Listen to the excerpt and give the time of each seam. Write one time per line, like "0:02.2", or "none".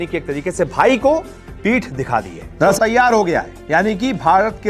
0:02.6